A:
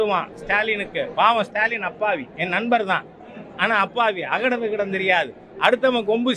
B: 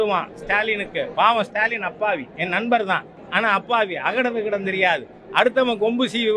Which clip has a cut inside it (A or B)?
B